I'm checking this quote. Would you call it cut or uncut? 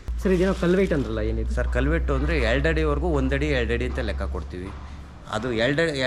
uncut